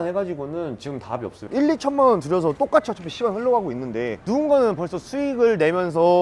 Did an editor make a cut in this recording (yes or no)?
yes